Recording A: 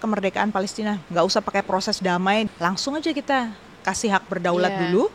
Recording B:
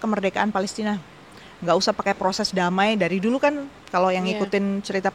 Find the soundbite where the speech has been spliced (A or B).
A